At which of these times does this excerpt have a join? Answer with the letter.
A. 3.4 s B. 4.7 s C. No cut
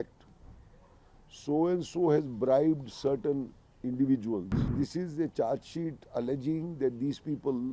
B